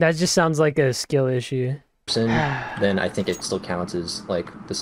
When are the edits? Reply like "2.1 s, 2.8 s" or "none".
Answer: 2.1 s